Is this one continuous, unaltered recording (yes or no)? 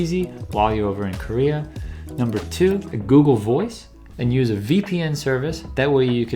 no